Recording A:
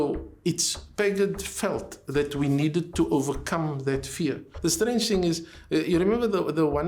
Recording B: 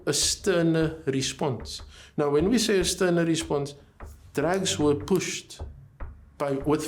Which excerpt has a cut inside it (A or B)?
A